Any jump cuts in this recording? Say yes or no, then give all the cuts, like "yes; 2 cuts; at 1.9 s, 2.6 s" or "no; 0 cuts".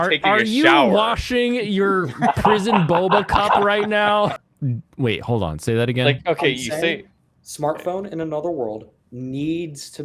yes; 1 cut; at 4.4 s